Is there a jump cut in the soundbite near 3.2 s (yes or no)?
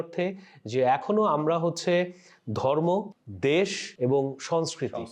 yes